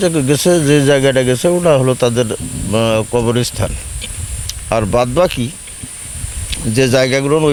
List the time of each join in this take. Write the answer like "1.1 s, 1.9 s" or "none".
none